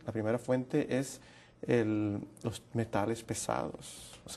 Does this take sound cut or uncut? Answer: cut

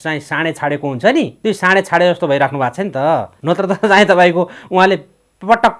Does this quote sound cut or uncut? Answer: cut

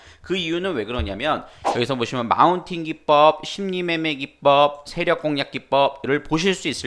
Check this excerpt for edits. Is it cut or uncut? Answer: cut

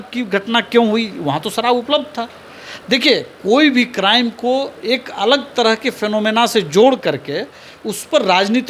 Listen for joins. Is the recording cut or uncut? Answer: uncut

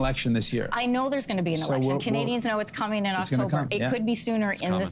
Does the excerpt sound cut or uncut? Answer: uncut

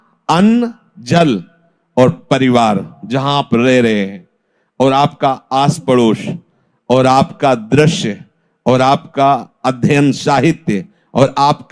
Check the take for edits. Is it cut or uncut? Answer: uncut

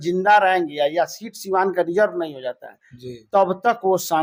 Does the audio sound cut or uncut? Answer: uncut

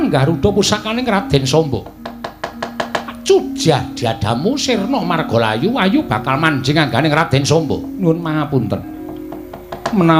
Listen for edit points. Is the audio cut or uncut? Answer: uncut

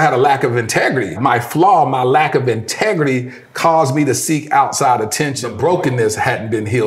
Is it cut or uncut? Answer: cut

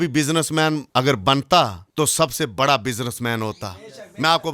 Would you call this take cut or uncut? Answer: cut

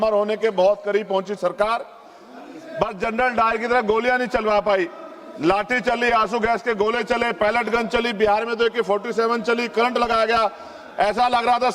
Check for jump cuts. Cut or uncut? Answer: uncut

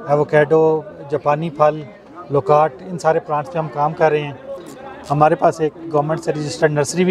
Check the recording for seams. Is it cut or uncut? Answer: uncut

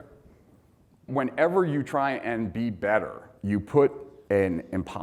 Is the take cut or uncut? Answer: cut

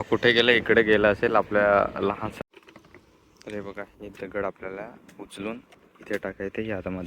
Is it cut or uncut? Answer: cut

